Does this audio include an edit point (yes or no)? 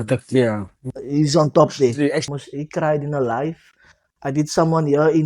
yes